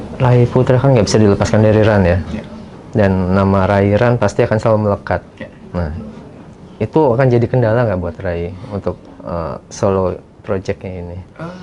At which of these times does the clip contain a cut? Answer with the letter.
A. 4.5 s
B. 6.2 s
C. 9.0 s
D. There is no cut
D